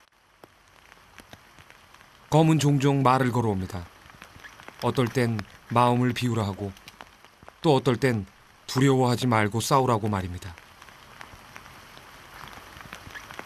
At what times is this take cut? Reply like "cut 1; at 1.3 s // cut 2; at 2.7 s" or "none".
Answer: cut 1; at 9.4 s